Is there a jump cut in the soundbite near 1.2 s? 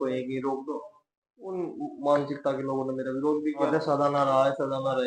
no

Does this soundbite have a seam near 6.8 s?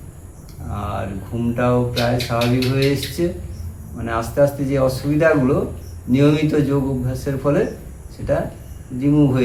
no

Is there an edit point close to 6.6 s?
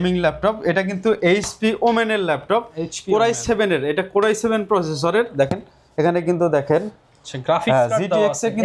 no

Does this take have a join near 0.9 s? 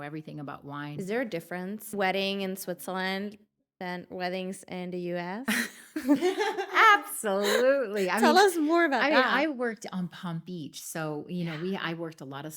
yes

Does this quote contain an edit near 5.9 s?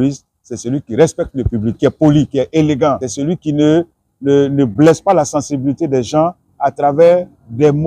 no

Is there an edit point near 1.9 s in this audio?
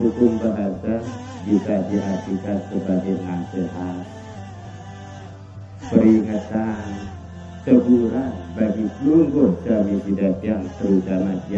no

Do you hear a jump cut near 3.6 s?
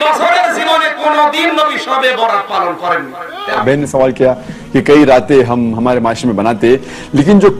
yes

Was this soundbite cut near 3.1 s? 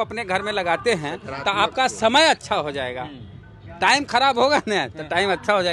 no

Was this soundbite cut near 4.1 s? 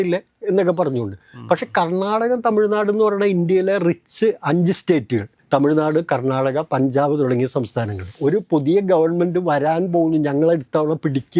no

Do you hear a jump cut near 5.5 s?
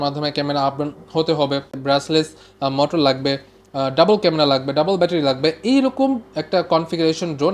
no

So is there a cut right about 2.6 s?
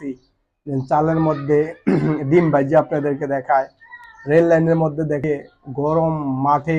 no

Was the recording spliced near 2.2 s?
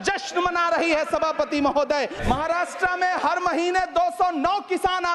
yes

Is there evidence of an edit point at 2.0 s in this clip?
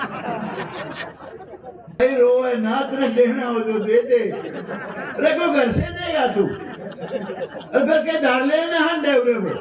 yes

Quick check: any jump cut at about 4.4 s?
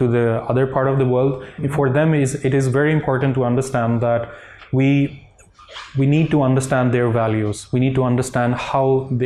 no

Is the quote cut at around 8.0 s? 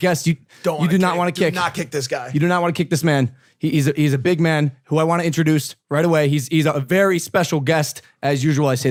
no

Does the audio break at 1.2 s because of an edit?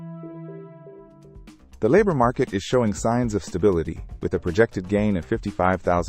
yes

